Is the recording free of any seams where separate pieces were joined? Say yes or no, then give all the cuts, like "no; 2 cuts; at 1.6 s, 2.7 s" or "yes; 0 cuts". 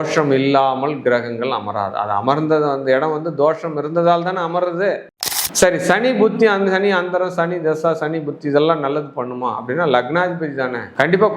no; 1 cut; at 5.0 s